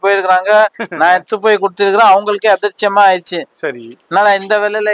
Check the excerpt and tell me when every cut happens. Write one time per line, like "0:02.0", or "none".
none